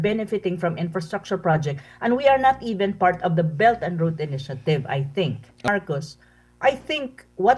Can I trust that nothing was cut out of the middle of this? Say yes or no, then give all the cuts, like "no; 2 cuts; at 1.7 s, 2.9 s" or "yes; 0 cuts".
no; 1 cut; at 5.7 s